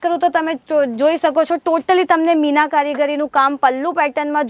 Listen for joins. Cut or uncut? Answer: uncut